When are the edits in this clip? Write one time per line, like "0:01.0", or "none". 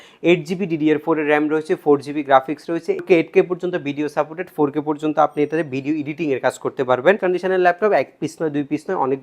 0:03.0
0:07.2